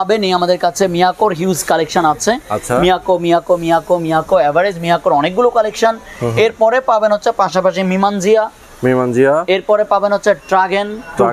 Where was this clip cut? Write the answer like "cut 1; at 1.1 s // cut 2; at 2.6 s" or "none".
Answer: none